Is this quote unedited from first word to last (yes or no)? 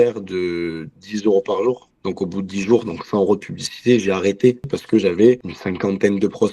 no